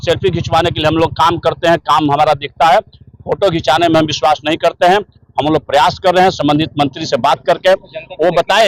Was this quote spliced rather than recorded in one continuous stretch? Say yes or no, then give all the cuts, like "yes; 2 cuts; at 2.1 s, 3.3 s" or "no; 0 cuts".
no; 0 cuts